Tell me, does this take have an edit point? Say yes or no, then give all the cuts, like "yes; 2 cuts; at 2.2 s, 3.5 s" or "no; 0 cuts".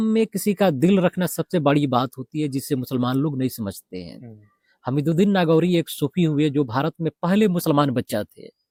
no; 0 cuts